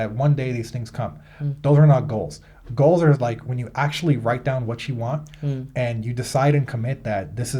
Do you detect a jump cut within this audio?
no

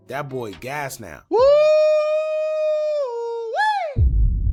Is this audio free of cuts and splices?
yes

